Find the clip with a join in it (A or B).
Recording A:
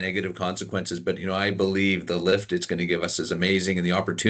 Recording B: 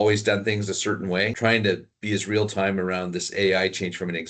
B